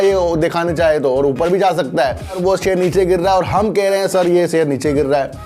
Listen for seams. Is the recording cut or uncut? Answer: cut